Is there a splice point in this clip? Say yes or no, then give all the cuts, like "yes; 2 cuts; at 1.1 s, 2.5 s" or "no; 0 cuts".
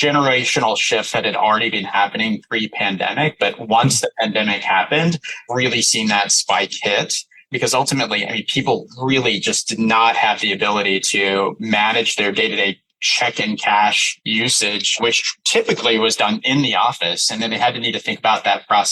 yes; 1 cut; at 15.3 s